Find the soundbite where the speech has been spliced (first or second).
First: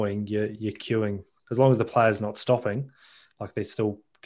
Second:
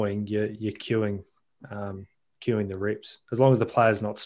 first